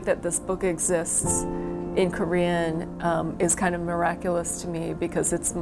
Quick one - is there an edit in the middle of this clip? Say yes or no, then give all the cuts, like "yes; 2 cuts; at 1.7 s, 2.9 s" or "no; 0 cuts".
no; 0 cuts